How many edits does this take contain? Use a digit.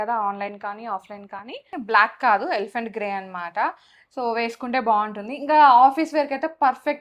1